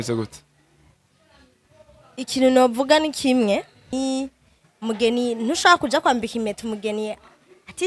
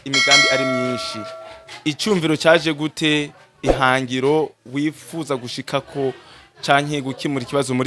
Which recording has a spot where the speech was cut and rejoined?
first; 1 cut; at 3.9 s

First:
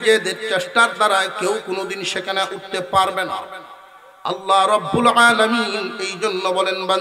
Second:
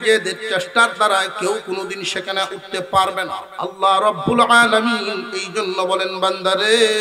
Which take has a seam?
second; 1 cut; at 3.4 s

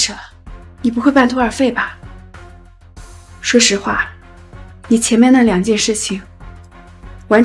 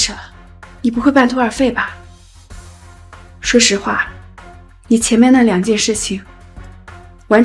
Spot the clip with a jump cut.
second; 2 cuts; at 1.9 s, 3.5 s

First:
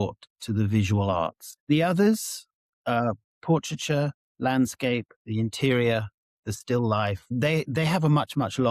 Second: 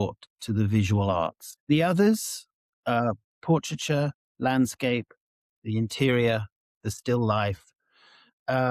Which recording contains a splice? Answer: first; 2 cuts; at 5.2 s, 7.3 s

